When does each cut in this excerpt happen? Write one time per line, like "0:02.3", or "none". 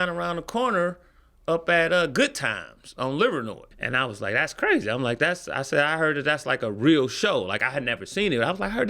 0:03.7